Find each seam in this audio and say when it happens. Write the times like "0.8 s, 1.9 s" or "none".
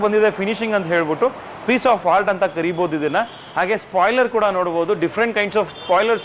none